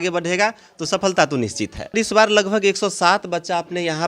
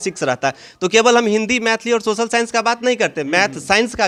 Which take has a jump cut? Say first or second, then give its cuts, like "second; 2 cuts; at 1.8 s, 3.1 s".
first; 1 cut; at 1.9 s